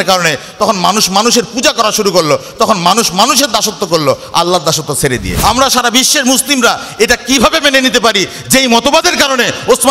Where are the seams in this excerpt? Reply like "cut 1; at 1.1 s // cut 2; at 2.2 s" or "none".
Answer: cut 1; at 5.3 s